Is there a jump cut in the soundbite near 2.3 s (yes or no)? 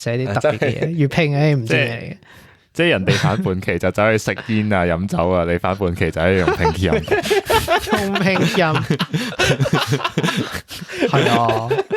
no